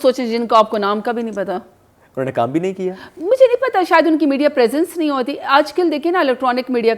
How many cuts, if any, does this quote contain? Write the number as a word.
zero